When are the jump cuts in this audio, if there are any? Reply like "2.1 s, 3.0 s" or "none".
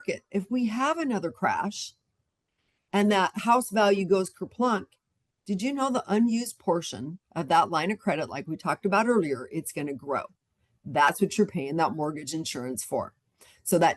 none